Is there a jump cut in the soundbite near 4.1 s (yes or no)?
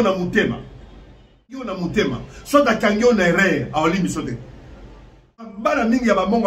no